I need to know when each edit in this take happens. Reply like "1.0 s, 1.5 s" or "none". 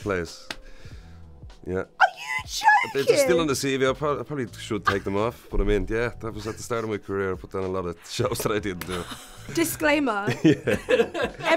9.5 s